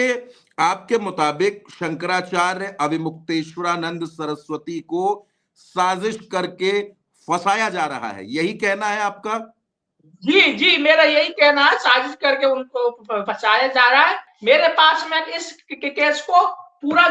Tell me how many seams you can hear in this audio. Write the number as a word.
one